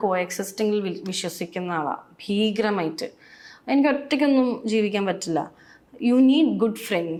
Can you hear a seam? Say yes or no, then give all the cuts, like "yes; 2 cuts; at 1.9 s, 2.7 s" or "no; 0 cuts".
no; 0 cuts